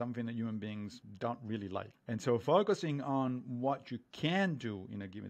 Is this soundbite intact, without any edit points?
no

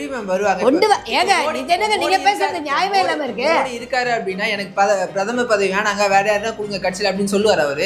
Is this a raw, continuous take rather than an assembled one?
yes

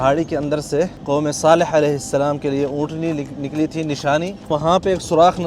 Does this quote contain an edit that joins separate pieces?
yes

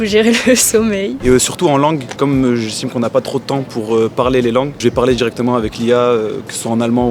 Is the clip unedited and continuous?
no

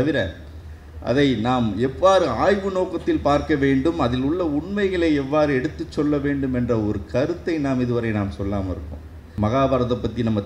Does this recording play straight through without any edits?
no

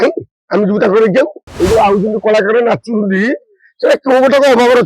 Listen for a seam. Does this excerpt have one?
yes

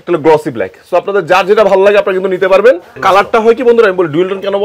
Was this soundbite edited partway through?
yes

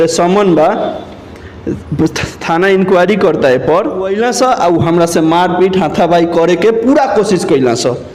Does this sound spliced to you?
yes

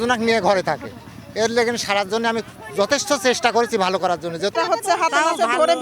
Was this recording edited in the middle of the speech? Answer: yes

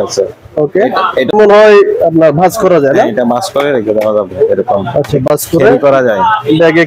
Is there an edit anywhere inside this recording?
no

